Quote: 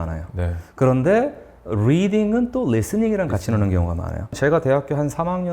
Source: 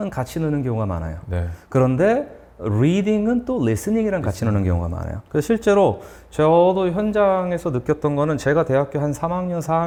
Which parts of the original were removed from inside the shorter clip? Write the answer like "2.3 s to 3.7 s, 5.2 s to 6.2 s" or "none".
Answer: 5.3 s to 8.4 s